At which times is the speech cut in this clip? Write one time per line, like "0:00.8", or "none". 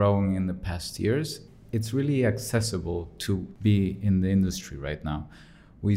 0:01.5
0:03.5